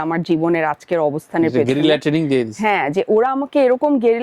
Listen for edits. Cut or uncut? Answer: uncut